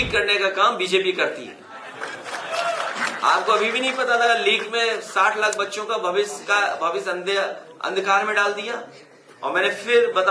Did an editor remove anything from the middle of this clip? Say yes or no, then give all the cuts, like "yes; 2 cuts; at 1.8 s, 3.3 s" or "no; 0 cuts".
no; 0 cuts